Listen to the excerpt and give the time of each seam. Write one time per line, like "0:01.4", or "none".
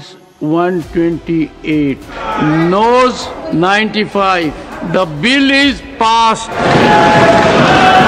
0:02.3
0:03.3
0:04.7
0:06.6